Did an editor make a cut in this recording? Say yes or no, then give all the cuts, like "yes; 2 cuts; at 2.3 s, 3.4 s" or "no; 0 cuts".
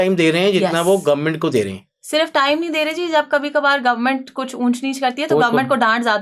no; 0 cuts